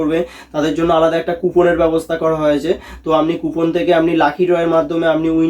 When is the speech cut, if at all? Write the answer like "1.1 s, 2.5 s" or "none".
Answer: none